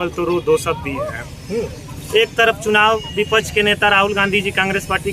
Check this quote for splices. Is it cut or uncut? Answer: uncut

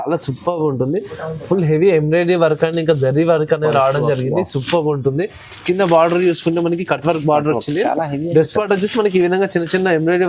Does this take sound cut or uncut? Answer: uncut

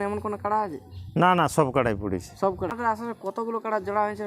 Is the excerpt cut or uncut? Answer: cut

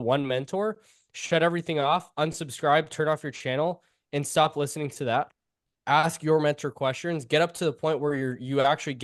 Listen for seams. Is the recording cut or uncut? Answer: uncut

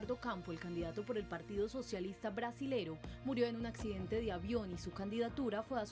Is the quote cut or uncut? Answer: cut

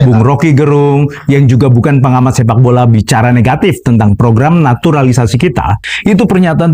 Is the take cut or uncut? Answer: cut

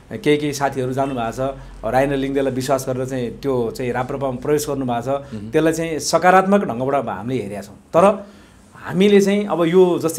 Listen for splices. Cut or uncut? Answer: uncut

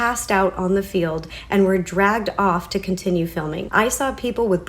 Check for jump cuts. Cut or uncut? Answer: cut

